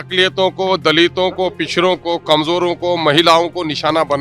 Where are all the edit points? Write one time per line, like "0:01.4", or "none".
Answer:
none